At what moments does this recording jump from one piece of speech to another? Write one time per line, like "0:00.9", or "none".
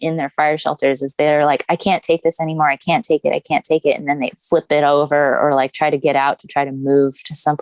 none